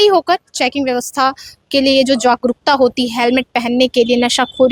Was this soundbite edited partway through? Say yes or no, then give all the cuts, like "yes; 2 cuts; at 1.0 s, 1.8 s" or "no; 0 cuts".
no; 0 cuts